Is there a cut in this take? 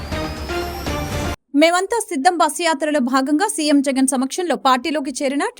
yes; 1 cut; at 1.2 s

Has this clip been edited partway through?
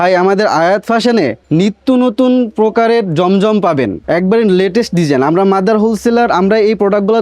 yes; 2 cuts; at 1.4 s, 4.0 s

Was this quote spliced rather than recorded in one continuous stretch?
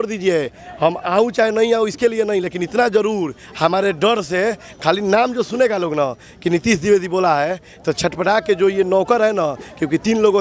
no; 0 cuts

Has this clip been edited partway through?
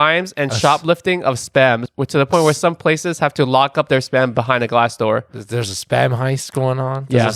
no; 0 cuts

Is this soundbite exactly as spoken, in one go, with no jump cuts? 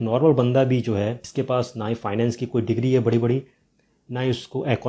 no; 1 cut; at 1.2 s

